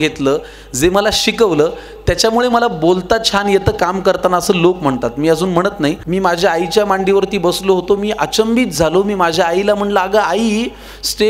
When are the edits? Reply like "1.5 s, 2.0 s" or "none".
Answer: 6.0 s